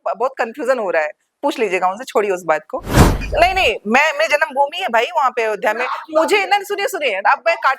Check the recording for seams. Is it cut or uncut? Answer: cut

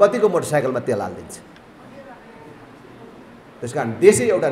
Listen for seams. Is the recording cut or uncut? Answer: uncut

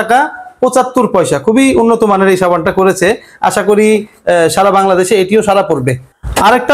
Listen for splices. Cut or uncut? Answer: uncut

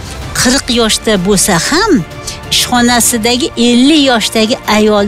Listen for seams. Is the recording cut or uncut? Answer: uncut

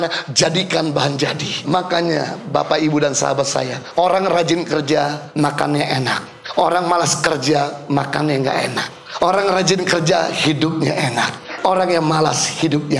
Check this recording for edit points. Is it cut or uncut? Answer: cut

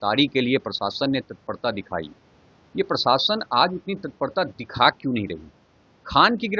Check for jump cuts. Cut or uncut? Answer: uncut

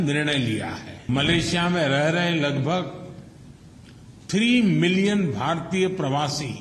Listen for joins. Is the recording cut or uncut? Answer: cut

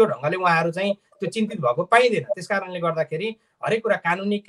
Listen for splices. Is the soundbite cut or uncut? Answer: uncut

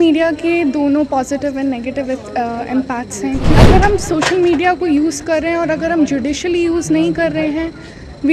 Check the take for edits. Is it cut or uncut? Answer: cut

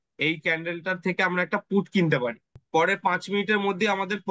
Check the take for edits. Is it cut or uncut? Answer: cut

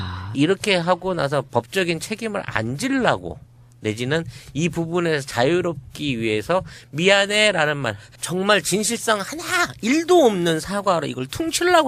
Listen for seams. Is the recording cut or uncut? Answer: uncut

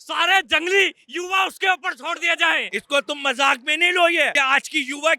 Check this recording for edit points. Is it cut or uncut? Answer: cut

